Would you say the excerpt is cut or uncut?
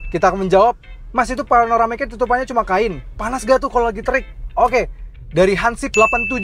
cut